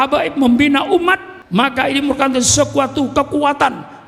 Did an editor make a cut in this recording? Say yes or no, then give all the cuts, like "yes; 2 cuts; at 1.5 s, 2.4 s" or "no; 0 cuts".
yes; 1 cut; at 1.3 s